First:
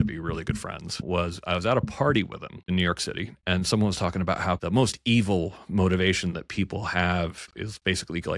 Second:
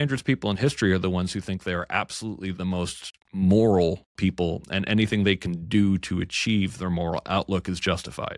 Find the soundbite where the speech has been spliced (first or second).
first